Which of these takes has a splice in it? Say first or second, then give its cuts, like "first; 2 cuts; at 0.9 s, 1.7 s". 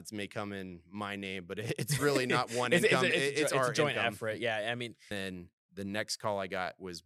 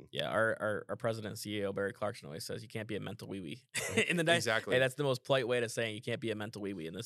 first; 1 cut; at 5.1 s